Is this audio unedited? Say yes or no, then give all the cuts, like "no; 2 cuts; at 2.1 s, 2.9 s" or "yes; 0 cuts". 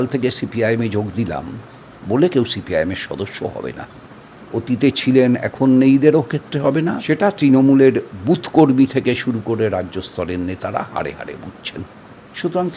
no; 2 cuts; at 4.4 s, 7.0 s